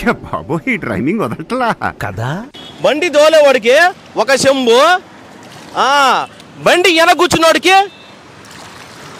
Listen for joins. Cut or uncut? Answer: cut